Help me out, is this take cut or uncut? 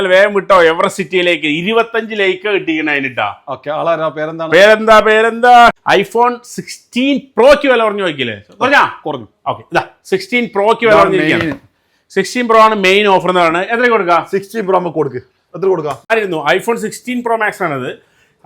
cut